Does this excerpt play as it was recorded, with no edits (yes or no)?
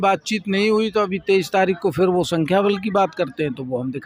yes